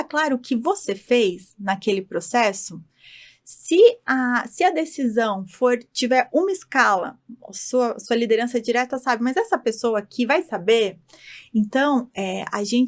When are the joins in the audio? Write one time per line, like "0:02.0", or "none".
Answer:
none